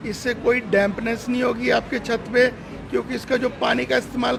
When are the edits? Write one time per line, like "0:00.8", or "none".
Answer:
none